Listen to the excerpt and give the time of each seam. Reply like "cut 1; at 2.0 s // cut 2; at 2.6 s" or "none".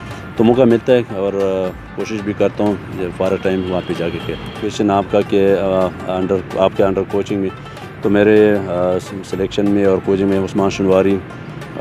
cut 1; at 4.7 s